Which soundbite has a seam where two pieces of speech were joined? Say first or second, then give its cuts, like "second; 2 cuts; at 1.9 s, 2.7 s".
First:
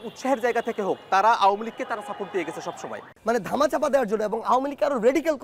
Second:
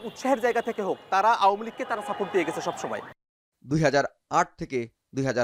first; 1 cut; at 3.1 s